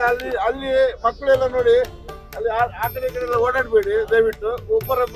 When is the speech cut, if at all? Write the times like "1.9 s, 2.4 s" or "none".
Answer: none